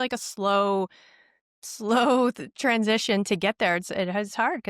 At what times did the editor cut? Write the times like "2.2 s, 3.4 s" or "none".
none